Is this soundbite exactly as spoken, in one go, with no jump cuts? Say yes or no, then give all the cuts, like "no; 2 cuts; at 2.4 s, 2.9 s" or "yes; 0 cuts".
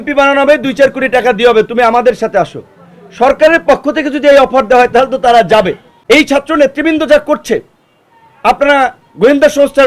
no; 1 cut; at 5.9 s